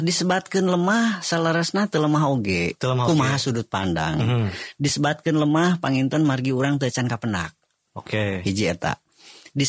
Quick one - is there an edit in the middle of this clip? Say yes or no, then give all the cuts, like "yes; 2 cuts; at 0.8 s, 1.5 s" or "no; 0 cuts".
no; 0 cuts